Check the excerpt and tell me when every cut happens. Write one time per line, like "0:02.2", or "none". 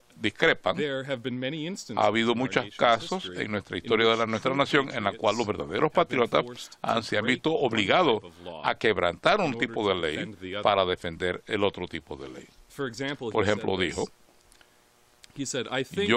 0:05.6